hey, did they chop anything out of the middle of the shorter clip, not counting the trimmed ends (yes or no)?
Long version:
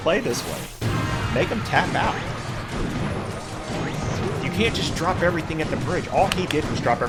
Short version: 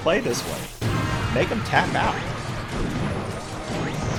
no